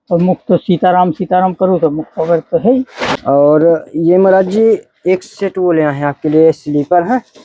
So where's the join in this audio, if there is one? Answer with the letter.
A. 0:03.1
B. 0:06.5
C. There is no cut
A